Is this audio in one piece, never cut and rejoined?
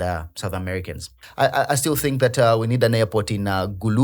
no; 1 cut; at 1.2 s

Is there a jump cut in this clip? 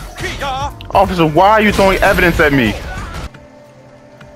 yes; 1 cut; at 3.3 s

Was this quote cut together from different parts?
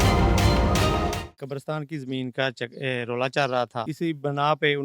yes; 2 cuts; at 1.3 s, 3.9 s

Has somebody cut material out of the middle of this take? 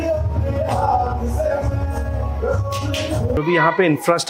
yes; 1 cut; at 3.4 s

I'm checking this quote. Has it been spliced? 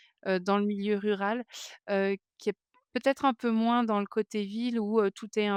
no; 0 cuts

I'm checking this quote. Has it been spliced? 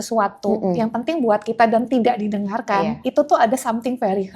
no; 0 cuts

